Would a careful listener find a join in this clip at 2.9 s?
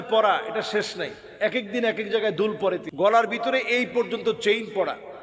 yes; 1 cut; at 2.9 s

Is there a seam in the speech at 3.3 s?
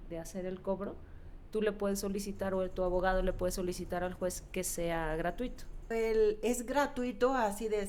no; 1 cut; at 5.9 s

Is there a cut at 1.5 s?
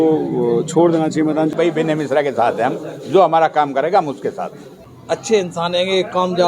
yes; 2 cuts; at 1.5 s, 4.9 s

